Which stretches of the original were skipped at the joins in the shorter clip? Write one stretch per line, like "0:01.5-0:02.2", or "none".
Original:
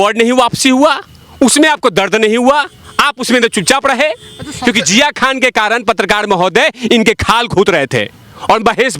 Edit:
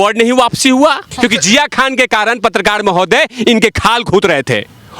0:01.1-0:04.5